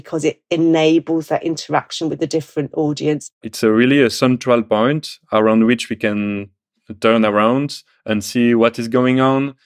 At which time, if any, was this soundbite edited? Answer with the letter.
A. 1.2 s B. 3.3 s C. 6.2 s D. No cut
B